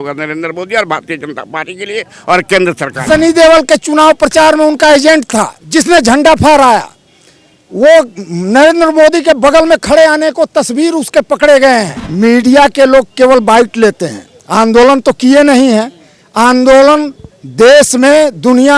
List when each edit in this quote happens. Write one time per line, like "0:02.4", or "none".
0:03.0
0:05.6
0:12.0